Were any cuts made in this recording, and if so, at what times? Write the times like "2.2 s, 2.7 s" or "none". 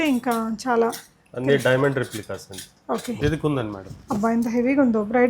3.2 s